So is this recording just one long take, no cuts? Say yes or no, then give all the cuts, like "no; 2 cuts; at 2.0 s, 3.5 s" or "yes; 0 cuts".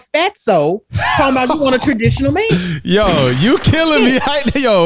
yes; 0 cuts